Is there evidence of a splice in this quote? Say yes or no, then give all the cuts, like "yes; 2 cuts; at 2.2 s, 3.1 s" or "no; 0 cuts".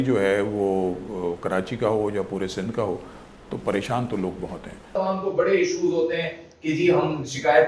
yes; 1 cut; at 5.0 s